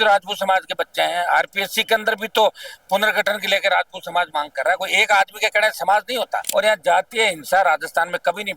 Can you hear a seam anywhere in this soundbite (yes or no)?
yes